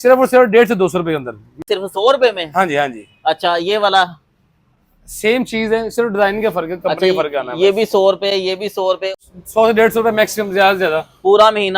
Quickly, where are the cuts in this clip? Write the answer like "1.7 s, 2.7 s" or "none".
1.6 s, 9.1 s